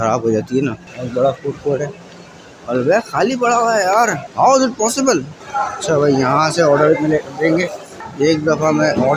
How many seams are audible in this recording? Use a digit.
3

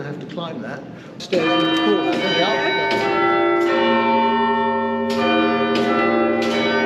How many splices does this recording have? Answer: 1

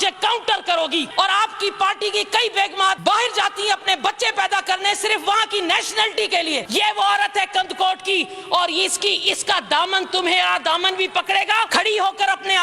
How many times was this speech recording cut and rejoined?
4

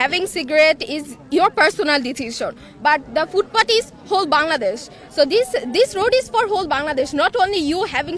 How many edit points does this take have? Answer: 0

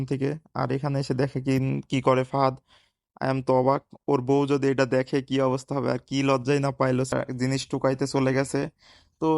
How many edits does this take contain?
1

